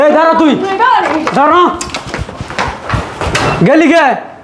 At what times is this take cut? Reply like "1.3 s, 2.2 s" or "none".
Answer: none